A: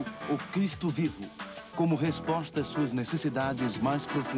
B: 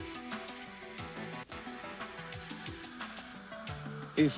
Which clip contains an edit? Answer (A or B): A